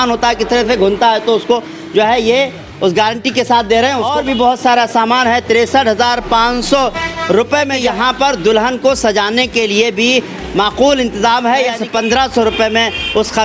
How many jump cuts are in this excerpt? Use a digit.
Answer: 3